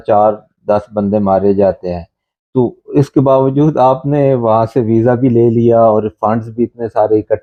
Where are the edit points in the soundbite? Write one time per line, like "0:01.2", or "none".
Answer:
none